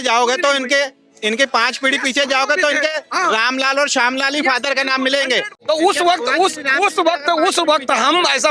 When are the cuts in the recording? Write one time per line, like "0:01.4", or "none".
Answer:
0:05.5